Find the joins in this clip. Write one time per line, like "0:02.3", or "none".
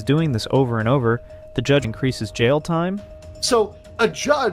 0:01.9